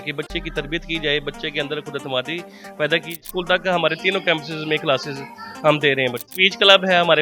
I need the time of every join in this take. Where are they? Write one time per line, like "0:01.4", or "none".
0:03.2
0:06.3